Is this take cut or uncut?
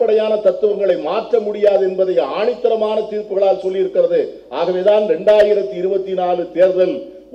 uncut